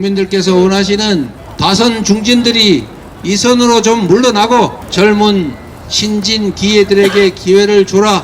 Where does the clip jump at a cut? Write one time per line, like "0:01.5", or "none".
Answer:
0:01.4
0:04.8

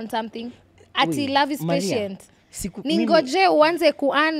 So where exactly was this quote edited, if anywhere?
none

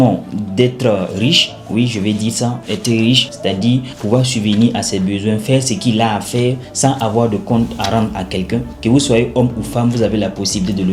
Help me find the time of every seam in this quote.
none

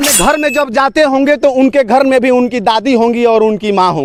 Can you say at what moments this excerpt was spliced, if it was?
none

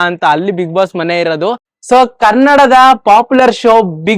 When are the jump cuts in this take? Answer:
0:01.7

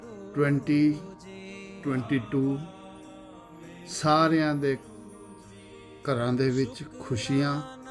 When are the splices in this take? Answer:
none

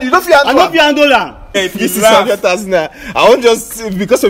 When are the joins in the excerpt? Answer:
0:01.6

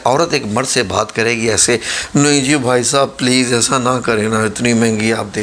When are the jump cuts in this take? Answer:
none

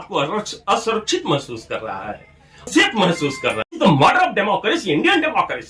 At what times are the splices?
0:03.8

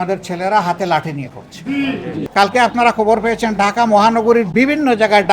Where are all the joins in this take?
0:02.1

